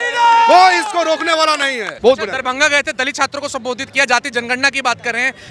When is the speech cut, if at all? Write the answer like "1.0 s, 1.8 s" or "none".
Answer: 1.9 s